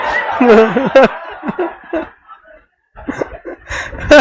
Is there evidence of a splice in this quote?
no; 0 cuts

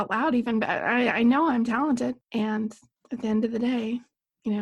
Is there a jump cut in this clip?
yes; 1 cut; at 2.2 s

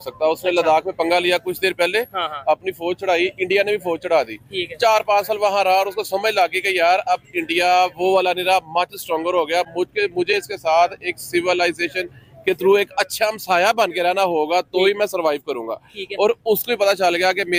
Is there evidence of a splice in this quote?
no; 0 cuts

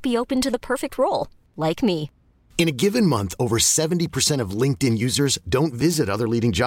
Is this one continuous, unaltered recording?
yes; 0 cuts

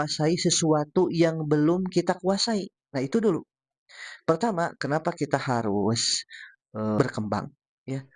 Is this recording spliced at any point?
yes; 1 cut; at 7.0 s

